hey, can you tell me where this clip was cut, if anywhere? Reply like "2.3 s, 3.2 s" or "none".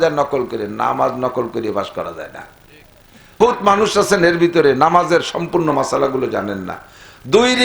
3.4 s